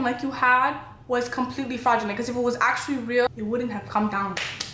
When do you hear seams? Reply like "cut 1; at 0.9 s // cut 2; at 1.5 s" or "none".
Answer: cut 1; at 3.3 s